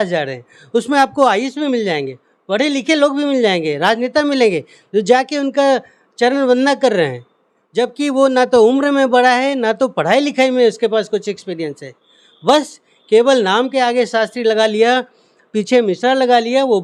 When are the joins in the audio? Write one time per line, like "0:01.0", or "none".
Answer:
none